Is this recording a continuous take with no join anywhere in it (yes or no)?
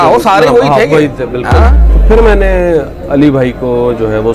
no